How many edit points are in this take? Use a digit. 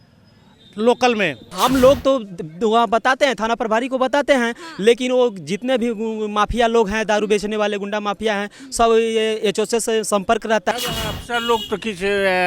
2